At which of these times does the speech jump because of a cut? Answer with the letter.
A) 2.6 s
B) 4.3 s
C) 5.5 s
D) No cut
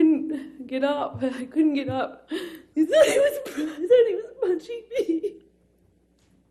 A